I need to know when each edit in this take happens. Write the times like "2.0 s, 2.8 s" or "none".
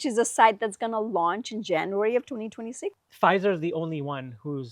2.9 s